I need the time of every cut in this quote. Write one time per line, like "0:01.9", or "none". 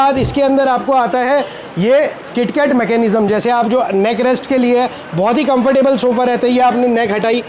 none